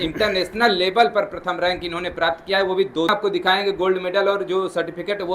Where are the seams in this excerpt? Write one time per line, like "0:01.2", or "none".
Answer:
0:02.1
0:03.1